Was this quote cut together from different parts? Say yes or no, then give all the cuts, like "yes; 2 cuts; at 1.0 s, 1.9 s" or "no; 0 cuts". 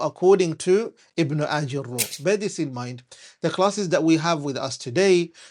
yes; 1 cut; at 2.1 s